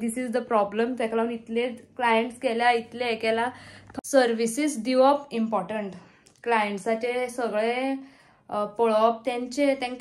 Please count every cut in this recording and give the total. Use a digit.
1